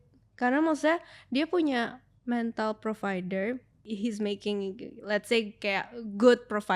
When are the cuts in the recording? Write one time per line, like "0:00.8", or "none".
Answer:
0:03.8